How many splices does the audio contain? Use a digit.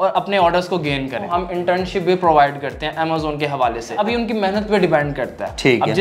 2